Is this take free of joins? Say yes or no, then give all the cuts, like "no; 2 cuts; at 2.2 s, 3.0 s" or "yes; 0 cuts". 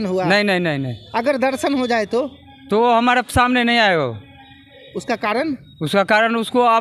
yes; 0 cuts